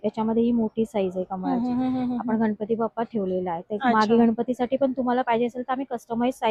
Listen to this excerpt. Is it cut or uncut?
uncut